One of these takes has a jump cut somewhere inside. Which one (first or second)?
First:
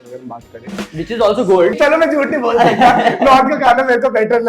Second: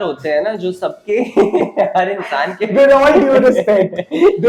first